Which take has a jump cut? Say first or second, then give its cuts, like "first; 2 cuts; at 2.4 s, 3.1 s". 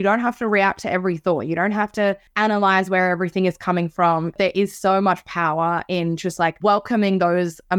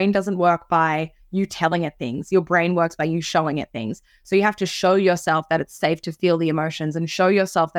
first; 3 cuts; at 2.3 s, 4.4 s, 6.6 s